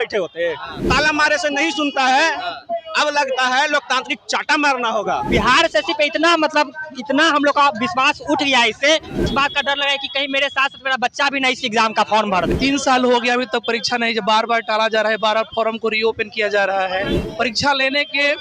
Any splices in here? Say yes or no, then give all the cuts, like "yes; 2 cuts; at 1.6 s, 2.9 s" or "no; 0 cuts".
yes; 5 cuts; at 0.8 s, 5.3 s, 9.3 s, 12.5 s, 17.2 s